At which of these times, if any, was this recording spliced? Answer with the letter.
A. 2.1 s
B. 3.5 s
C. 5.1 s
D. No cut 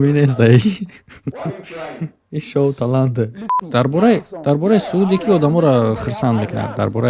B